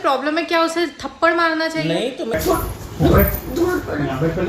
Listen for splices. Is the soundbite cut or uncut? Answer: cut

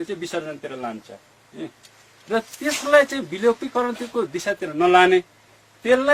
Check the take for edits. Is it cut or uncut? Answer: uncut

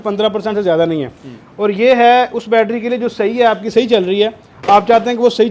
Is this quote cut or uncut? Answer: uncut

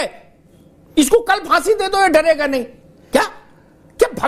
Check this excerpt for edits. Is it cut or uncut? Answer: uncut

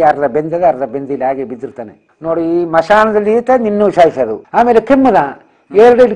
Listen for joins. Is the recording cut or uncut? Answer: cut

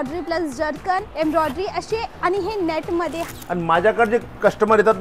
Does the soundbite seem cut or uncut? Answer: cut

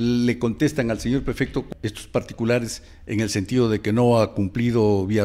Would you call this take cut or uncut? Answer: cut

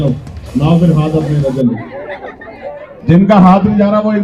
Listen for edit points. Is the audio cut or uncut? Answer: cut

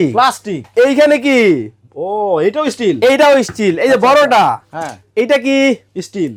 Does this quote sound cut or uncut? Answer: uncut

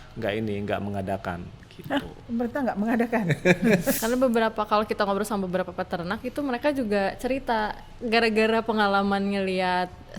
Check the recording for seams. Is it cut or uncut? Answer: cut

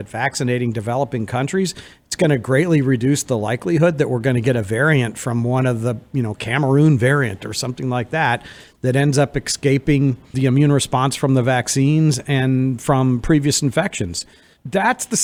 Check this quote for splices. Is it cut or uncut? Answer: uncut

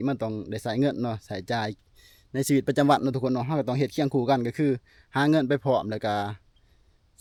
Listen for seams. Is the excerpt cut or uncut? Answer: uncut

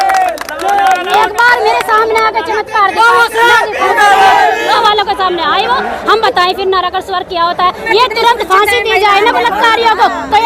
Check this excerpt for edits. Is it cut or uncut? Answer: cut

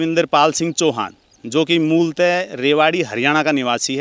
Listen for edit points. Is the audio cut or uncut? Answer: uncut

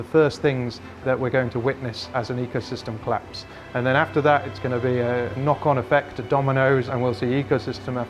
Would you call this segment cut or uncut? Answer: cut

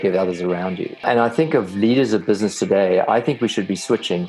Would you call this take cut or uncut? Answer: cut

